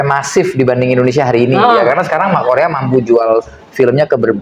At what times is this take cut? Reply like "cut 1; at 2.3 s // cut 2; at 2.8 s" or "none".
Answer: none